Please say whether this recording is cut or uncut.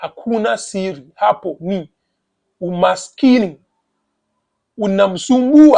uncut